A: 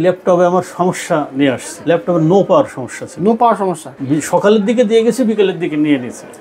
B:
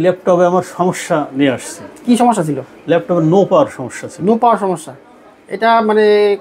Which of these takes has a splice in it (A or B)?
A